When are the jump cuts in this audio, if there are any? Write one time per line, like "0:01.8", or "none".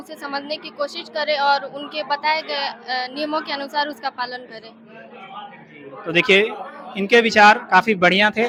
none